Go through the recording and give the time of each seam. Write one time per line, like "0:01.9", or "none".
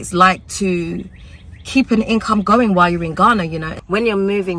0:03.7